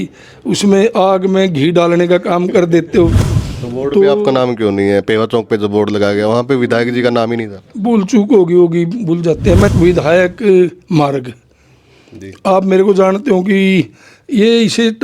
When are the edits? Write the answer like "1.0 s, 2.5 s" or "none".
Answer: 3.3 s, 9.7 s